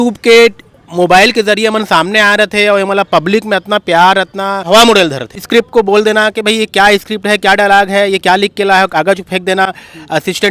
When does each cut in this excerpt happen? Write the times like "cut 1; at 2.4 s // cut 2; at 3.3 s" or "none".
cut 1; at 4.6 s // cut 2; at 5.3 s